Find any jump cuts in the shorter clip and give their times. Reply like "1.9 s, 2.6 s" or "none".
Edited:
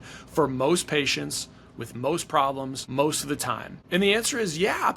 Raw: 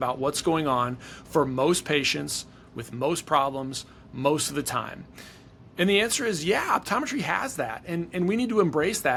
2.8 s, 3.7 s